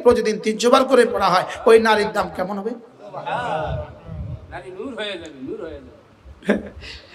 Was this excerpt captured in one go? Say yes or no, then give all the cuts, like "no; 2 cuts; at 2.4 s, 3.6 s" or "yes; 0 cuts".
yes; 0 cuts